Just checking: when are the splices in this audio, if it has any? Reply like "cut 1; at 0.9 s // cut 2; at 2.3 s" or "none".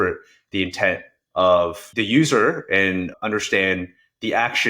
cut 1; at 1.9 s // cut 2; at 3.1 s